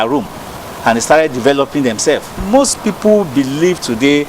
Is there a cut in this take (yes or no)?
yes